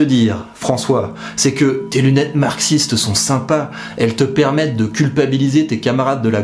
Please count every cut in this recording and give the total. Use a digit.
1